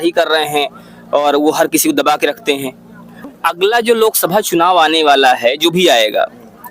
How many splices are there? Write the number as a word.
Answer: one